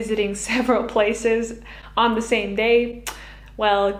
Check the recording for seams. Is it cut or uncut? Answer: uncut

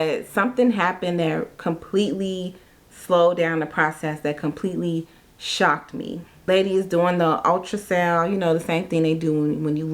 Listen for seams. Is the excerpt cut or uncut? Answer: cut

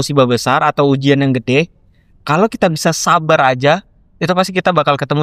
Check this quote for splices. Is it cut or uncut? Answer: uncut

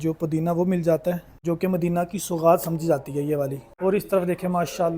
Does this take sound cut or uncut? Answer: cut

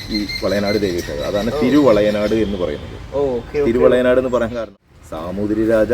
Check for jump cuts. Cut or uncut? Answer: cut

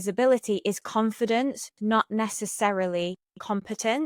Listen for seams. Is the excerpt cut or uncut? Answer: uncut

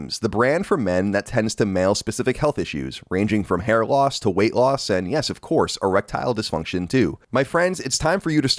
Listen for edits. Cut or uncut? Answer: cut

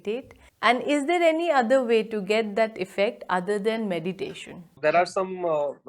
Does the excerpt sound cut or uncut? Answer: cut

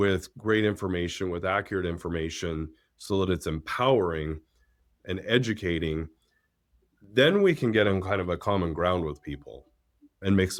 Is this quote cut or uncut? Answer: uncut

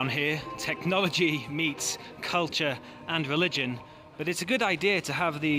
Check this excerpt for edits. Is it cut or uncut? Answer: uncut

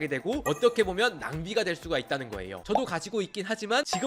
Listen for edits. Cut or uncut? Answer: cut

